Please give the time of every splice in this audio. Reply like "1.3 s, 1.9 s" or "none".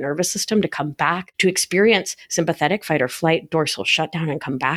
1.3 s

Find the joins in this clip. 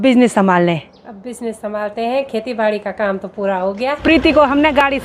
4.0 s

